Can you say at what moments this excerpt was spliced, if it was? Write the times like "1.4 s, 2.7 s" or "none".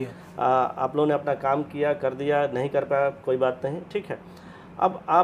none